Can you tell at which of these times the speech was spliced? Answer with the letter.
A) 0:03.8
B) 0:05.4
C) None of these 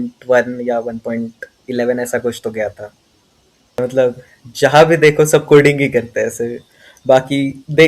A